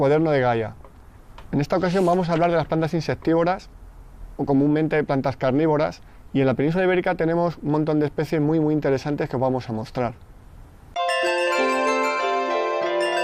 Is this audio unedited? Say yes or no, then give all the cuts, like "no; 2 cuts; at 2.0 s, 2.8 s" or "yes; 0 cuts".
yes; 0 cuts